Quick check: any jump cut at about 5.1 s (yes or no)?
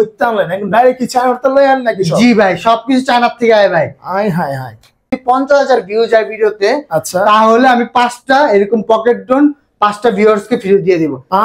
yes